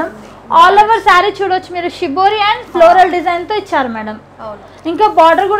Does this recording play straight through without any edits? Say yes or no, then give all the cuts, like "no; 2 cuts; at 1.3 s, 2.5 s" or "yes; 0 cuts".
yes; 0 cuts